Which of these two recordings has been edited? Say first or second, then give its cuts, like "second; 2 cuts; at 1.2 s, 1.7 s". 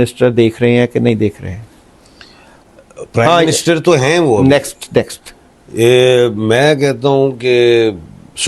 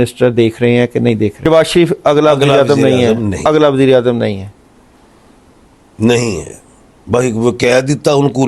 second; 1 cut; at 1.4 s